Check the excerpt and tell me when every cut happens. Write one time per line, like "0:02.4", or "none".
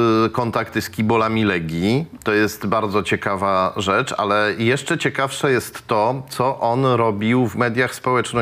none